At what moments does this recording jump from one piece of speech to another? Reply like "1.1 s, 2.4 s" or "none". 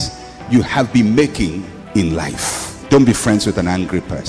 2.7 s